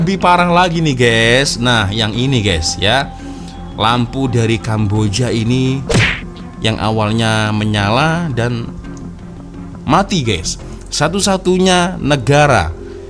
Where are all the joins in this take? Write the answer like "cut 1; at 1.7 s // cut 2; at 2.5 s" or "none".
none